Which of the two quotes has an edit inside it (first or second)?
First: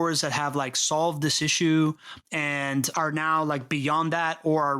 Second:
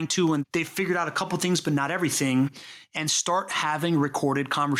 first